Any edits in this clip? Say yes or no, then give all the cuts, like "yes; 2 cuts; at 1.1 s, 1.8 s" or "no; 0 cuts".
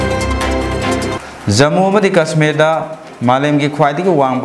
yes; 1 cut; at 1.1 s